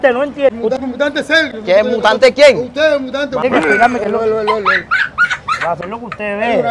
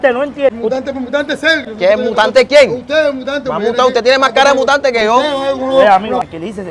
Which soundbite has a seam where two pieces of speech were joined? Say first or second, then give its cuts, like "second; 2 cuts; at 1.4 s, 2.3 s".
first; 3 cuts; at 0.8 s, 3.4 s, 5.8 s